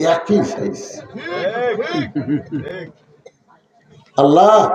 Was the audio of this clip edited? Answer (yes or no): no